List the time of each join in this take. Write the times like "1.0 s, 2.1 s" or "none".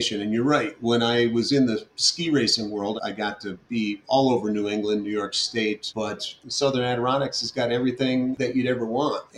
3.0 s, 6.2 s, 8.4 s